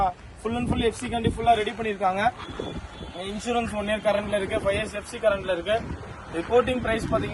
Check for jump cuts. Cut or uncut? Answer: uncut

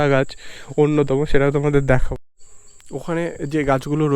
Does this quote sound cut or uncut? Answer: cut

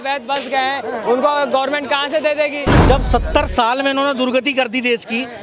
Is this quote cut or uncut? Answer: cut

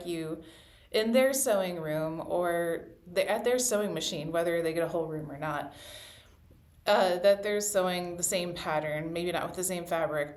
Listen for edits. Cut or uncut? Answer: uncut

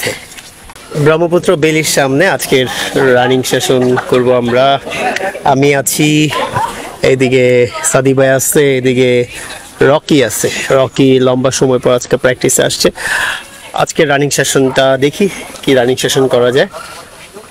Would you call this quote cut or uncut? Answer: uncut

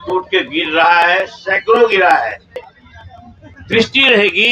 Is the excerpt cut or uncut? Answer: cut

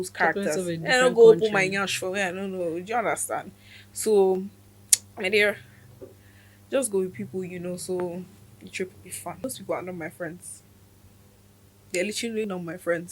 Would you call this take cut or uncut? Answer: cut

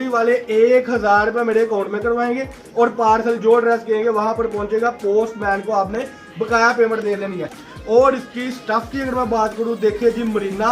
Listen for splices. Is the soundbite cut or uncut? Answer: cut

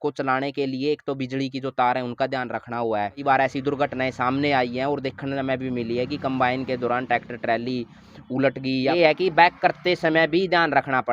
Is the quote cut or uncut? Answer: cut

